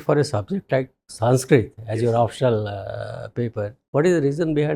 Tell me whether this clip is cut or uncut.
cut